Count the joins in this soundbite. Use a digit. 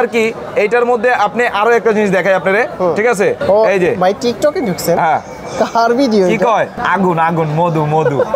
2